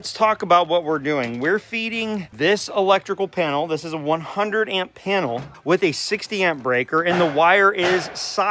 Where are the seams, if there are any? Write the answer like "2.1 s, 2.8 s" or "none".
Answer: 2.3 s, 5.6 s